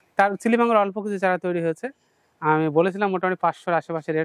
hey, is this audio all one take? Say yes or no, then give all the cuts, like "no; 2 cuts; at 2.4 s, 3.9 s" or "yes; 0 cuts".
yes; 0 cuts